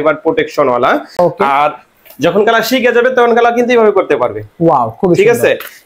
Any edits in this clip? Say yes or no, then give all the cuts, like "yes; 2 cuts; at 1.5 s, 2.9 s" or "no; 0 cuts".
no; 0 cuts